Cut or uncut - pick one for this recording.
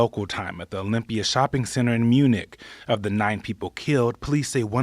cut